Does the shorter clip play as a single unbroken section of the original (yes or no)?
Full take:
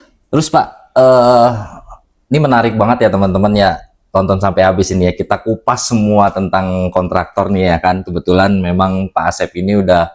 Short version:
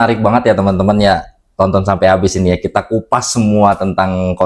yes